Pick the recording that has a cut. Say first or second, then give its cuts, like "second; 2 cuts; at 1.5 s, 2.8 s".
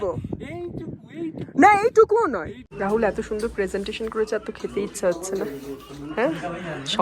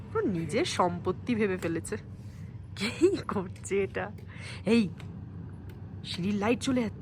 first; 1 cut; at 2.6 s